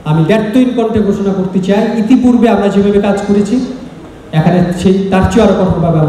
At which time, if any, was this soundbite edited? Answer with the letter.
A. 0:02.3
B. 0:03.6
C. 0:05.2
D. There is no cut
D